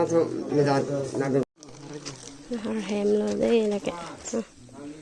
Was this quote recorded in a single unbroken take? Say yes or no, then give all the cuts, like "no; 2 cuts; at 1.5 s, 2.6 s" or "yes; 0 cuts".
no; 1 cut; at 1.5 s